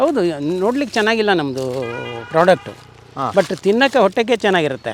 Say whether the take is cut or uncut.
uncut